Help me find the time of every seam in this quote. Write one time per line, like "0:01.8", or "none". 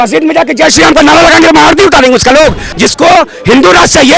0:02.6